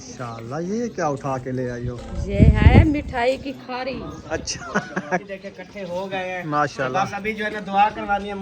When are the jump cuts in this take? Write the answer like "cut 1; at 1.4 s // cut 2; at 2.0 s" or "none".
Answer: cut 1; at 5.3 s